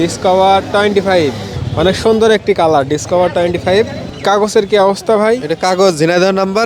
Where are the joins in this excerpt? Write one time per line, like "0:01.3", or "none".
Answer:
0:01.5
0:04.1